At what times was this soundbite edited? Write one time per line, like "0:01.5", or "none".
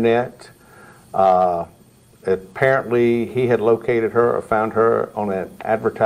none